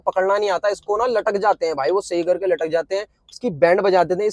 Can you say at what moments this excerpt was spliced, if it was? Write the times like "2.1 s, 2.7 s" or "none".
none